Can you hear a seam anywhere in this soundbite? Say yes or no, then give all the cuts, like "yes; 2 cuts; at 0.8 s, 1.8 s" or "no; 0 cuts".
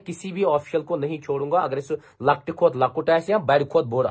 no; 0 cuts